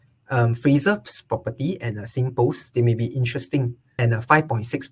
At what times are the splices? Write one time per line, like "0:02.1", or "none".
0:03.8